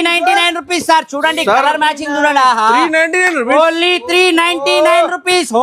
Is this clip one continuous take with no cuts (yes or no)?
yes